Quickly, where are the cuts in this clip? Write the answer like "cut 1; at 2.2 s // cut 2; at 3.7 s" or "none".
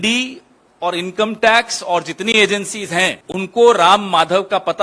cut 1; at 3.2 s